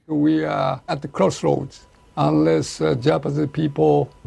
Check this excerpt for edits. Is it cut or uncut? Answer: cut